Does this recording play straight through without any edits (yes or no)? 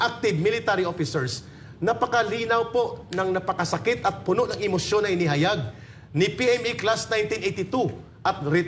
yes